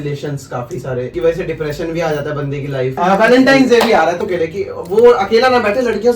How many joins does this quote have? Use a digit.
3